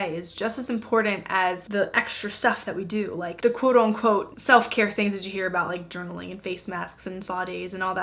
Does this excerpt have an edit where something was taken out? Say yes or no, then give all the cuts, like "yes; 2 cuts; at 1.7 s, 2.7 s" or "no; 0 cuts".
no; 0 cuts